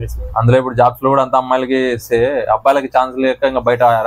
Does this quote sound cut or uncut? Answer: uncut